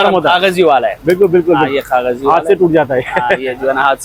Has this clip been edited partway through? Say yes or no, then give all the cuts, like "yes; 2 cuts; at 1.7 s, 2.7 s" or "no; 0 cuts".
no; 0 cuts